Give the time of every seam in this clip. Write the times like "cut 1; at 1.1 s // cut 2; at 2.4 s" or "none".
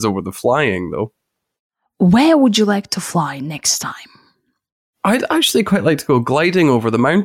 none